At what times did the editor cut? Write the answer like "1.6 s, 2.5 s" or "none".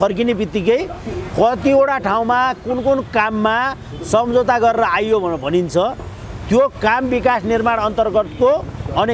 none